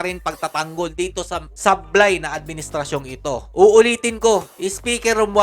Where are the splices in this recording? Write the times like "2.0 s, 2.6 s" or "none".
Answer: none